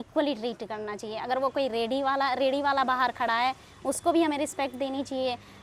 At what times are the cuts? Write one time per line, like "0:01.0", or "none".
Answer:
none